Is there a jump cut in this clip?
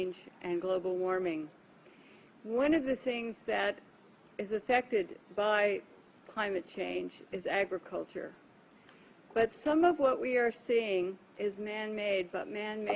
no; 0 cuts

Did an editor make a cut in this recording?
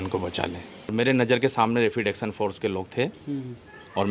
yes; 1 cut; at 0.9 s

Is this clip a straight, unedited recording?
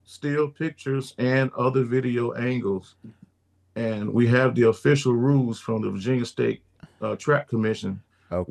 yes; 0 cuts

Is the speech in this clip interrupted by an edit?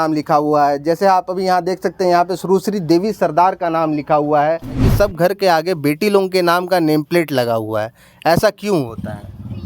yes; 1 cut; at 4.9 s

